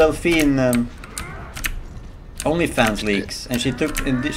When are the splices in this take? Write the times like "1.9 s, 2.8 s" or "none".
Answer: none